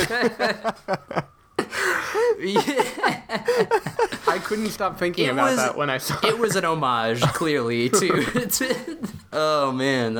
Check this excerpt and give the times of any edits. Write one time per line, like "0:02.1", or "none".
0:09.2

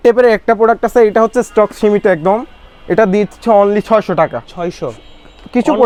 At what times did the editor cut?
none

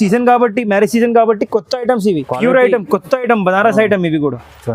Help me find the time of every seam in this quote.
0:02.2

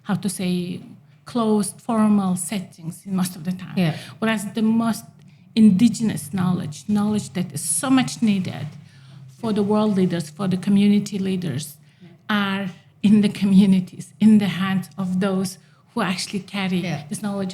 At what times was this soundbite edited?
none

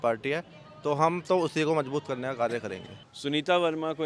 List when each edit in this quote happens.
none

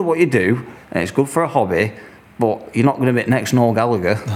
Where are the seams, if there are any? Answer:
none

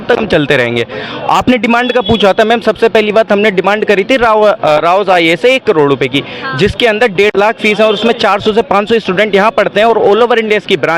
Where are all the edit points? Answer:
none

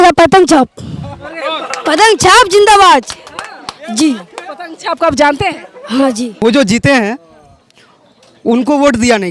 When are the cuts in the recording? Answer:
0:06.4

